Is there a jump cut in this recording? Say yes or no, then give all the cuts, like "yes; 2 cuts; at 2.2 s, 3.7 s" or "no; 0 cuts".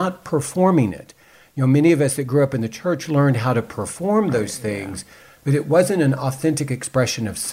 no; 0 cuts